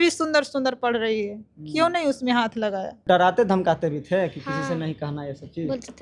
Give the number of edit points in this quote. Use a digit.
1